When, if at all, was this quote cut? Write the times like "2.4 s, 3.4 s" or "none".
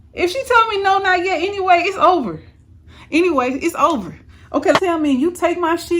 4.7 s